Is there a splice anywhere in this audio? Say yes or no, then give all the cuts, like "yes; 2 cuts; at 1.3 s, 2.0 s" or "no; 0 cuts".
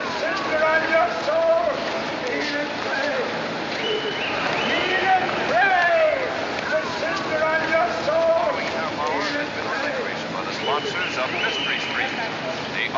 yes; 1 cut; at 3.1 s